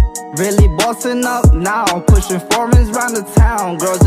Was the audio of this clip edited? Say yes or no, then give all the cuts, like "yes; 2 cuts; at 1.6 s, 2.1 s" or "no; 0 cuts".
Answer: no; 0 cuts